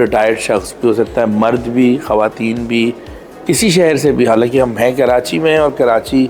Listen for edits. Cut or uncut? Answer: uncut